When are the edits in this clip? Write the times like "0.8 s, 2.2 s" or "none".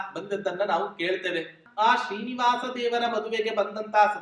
1.6 s